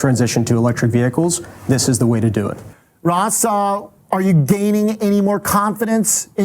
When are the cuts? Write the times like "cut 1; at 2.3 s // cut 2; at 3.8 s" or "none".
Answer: cut 1; at 2.7 s